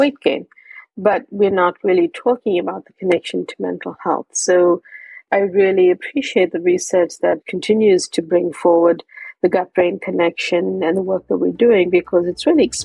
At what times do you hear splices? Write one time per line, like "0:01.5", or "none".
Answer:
0:05.2
0:07.5